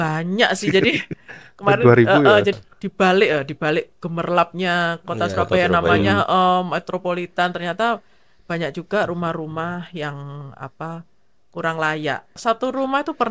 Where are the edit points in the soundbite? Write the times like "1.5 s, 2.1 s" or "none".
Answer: 2.6 s, 12.4 s